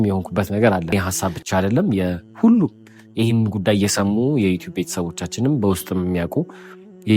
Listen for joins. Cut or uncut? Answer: cut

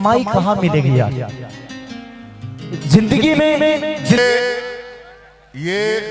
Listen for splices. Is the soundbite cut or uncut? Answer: cut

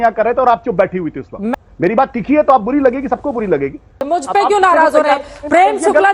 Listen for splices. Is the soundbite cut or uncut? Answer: cut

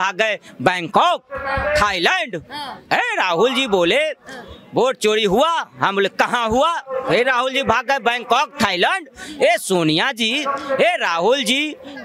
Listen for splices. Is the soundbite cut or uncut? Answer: uncut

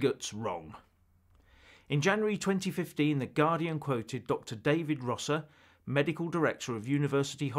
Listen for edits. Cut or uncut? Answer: uncut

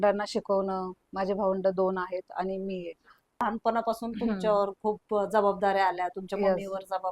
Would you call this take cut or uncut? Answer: cut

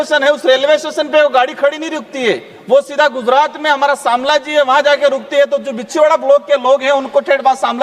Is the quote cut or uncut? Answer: uncut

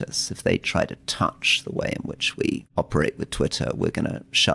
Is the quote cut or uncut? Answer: cut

